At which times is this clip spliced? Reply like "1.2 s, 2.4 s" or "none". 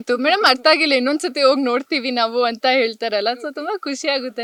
none